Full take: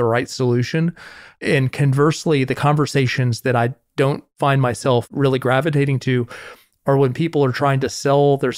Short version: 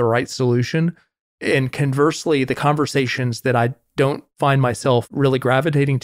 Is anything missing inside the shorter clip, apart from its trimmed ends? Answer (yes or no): no